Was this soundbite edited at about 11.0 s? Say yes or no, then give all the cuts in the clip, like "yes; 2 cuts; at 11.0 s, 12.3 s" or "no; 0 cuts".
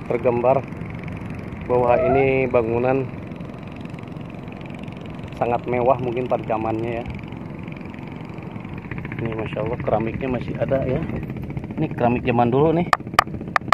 no; 1 cut; at 8.8 s